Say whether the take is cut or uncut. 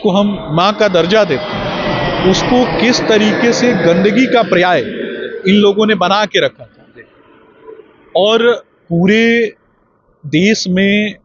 uncut